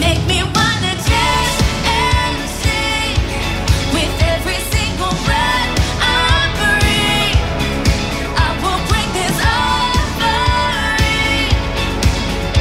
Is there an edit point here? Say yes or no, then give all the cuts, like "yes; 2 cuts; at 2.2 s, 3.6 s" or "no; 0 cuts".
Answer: no; 0 cuts